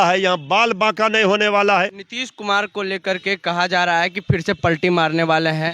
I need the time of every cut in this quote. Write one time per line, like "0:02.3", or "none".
0:02.1